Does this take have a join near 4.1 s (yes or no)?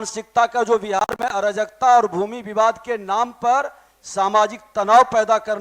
no